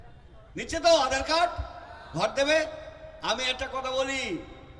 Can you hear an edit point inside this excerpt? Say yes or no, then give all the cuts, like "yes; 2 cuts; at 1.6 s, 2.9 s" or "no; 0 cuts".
no; 0 cuts